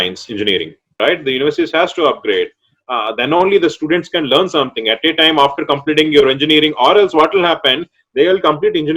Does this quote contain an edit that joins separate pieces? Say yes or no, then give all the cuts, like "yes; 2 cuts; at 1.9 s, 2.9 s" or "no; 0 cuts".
yes; 1 cut; at 1.0 s